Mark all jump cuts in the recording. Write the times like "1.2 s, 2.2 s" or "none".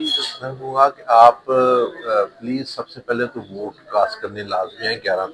none